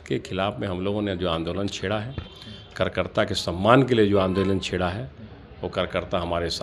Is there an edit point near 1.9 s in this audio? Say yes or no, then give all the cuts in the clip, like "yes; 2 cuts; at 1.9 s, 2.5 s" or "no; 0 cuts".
no; 0 cuts